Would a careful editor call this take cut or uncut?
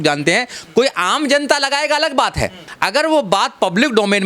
cut